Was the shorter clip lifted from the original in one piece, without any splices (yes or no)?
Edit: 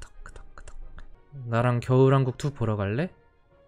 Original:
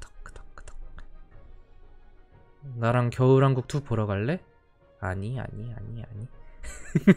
no